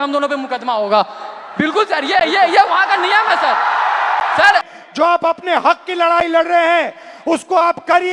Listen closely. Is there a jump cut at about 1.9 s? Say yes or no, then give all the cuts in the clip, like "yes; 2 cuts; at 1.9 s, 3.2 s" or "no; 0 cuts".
no; 1 cut; at 4.7 s